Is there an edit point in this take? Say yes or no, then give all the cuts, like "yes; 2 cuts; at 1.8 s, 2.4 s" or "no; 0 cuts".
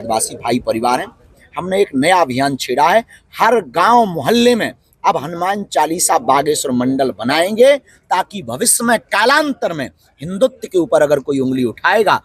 yes; 1 cut; at 1.4 s